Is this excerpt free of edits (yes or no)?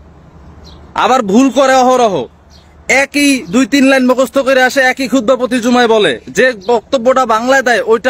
yes